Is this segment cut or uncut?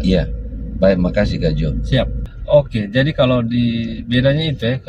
cut